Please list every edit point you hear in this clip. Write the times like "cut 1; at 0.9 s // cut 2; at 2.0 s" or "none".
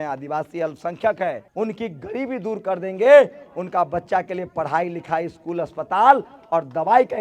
cut 1; at 1.5 s